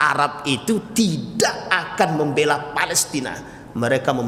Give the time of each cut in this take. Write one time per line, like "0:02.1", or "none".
none